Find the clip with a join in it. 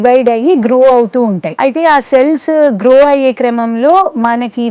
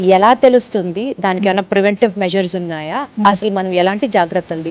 first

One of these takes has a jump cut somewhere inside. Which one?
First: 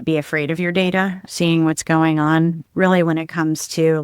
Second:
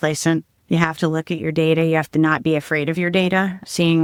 first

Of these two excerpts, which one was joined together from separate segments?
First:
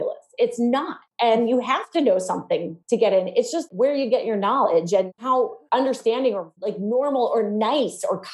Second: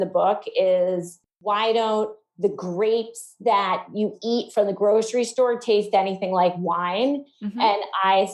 first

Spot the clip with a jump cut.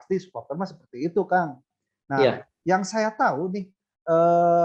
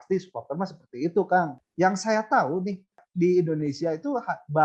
second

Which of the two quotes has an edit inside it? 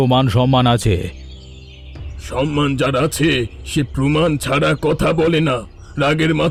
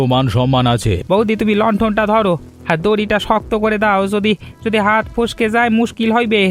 second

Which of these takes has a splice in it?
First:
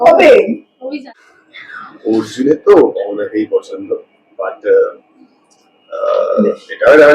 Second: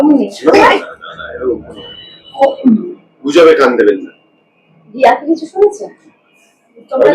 first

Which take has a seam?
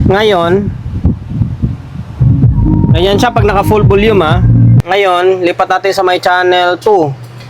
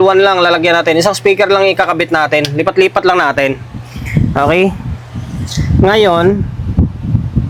first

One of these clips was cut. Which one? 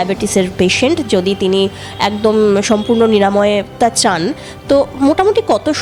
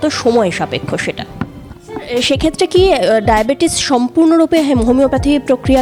second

